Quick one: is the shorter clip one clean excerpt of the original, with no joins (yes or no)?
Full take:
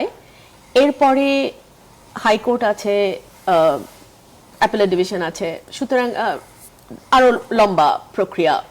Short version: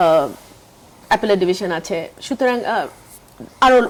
yes